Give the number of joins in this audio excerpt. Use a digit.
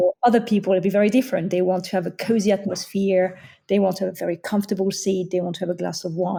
0